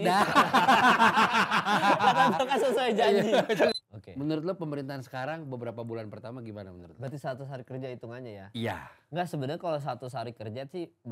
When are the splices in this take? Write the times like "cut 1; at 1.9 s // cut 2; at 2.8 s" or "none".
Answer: cut 1; at 3.7 s